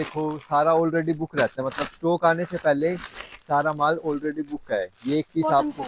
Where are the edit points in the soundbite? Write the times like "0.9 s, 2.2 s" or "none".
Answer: none

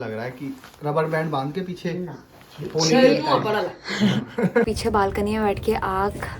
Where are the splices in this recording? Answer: 4.7 s

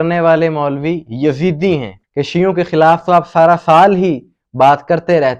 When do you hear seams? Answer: 2.0 s

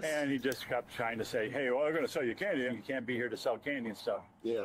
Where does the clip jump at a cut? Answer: 2.7 s

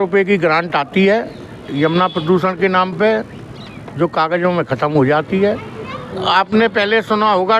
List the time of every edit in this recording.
6.1 s

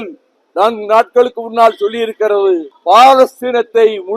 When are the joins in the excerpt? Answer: 2.7 s

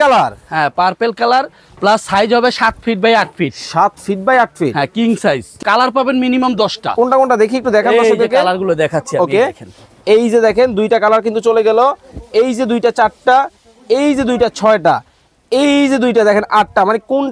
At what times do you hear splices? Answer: 5.6 s

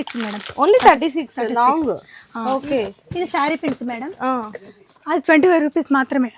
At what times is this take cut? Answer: none

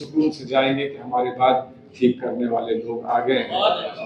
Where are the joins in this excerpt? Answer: none

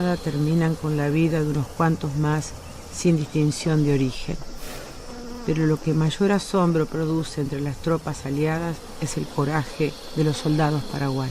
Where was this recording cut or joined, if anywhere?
6.5 s

